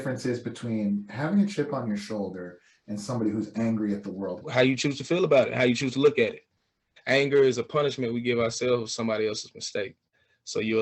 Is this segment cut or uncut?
cut